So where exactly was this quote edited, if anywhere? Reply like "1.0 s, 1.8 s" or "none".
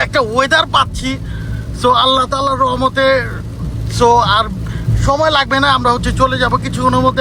none